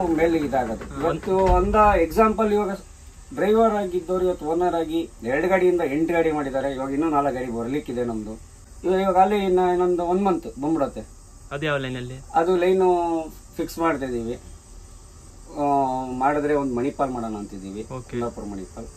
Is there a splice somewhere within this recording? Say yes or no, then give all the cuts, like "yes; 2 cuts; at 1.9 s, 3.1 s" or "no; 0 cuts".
no; 0 cuts